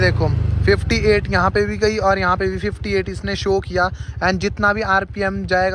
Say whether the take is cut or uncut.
uncut